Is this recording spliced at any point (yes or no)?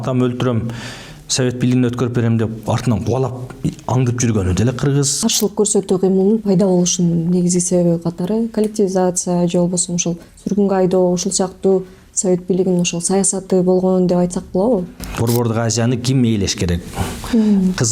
yes